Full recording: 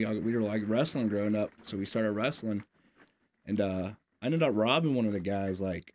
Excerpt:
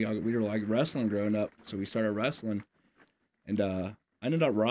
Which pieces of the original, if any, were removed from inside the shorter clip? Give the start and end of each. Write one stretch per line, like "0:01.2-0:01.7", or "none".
none